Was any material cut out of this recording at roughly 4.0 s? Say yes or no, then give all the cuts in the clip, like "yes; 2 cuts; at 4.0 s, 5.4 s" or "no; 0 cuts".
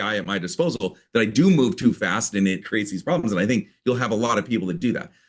no; 1 cut; at 2.6 s